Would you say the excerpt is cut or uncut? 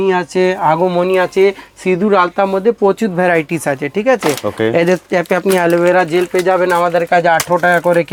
uncut